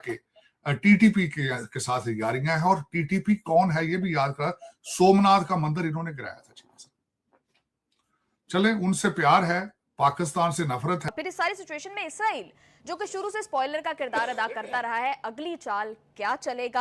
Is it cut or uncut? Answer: uncut